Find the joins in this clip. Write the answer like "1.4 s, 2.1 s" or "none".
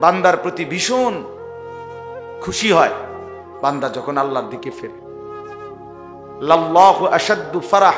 1.2 s, 2.5 s, 4.7 s, 6.2 s